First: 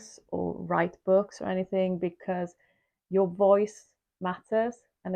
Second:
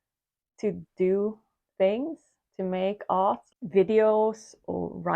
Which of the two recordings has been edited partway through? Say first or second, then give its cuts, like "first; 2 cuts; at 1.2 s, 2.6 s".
second; 1 cut; at 3.5 s